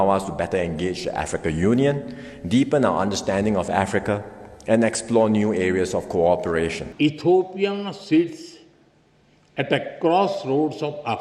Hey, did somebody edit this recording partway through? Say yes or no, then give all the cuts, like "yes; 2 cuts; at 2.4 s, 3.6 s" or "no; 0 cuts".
yes; 1 cut; at 6.8 s